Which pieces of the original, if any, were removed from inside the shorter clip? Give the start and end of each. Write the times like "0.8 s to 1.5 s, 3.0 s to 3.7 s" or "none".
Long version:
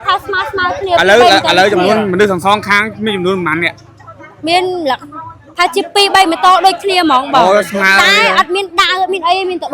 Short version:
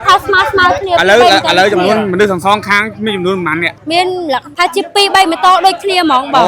3.8 s to 4.3 s, 5.0 s to 5.5 s